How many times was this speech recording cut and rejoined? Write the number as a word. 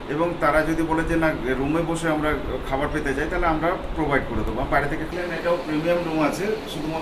one